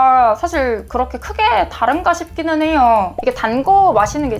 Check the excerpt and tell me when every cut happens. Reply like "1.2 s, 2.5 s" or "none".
3.2 s